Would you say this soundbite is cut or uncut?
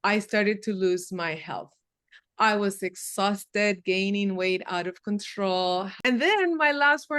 cut